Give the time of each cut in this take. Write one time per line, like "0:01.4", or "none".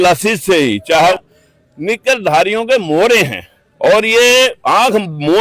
0:01.1